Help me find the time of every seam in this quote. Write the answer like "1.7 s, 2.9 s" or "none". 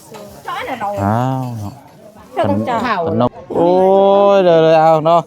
3.3 s